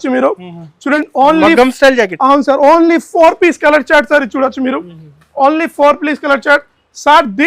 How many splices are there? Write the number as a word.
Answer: one